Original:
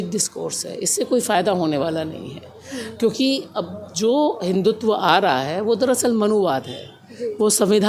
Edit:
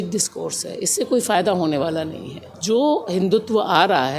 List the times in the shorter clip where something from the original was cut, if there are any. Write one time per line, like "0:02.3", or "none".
0:02.5